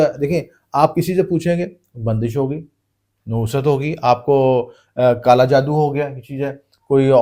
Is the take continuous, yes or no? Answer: yes